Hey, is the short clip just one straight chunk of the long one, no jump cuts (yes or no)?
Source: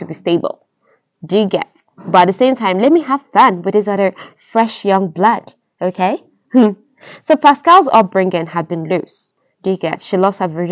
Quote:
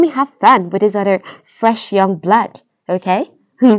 yes